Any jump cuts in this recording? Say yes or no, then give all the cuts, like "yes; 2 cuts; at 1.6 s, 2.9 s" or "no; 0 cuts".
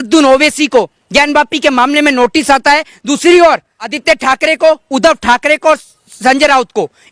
yes; 1 cut; at 3.9 s